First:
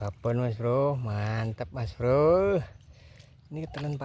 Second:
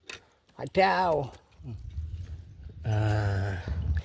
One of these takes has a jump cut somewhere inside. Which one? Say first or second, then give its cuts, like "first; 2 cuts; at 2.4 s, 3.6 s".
second; 1 cut; at 1.5 s